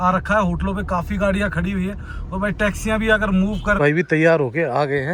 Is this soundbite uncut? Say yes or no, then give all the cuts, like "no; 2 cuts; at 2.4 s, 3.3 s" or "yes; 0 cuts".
no; 1 cut; at 3.8 s